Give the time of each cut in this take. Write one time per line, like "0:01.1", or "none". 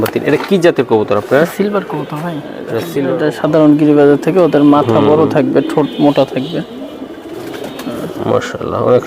0:03.1